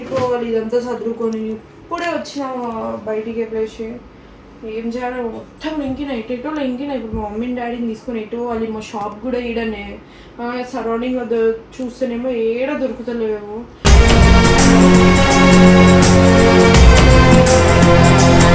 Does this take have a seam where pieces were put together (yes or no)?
no